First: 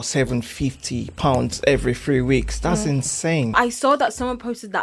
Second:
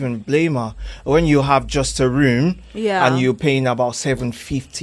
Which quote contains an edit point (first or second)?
first